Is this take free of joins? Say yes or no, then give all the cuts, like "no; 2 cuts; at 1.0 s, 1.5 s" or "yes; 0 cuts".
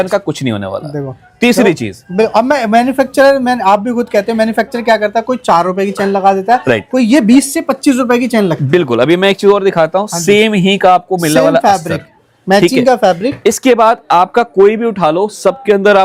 yes; 0 cuts